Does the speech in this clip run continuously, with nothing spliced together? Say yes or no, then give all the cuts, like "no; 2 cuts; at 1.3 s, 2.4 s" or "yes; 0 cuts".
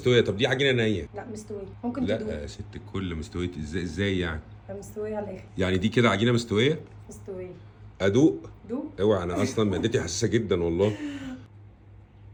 yes; 0 cuts